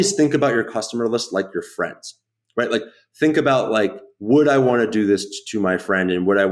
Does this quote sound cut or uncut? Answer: uncut